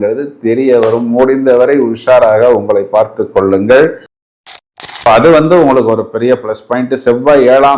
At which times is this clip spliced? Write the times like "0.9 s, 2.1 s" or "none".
4.4 s